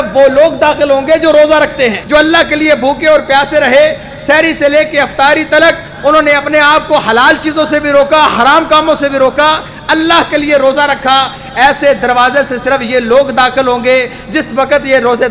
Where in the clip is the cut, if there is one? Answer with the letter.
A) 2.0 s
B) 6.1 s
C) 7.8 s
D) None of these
A